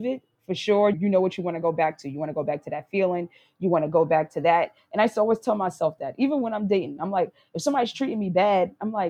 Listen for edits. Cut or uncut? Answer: cut